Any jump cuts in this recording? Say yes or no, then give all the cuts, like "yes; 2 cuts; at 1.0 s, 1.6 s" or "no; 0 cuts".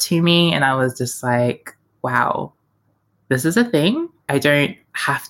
yes; 2 cuts; at 1.9 s, 4.3 s